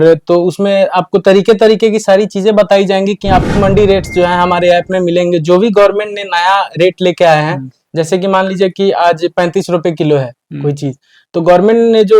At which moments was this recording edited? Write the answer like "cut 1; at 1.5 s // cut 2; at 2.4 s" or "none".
cut 1; at 3.5 s